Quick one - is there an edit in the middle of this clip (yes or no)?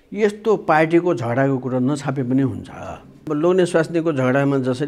yes